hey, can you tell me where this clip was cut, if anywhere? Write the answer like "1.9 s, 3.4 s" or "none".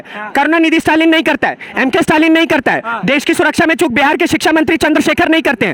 none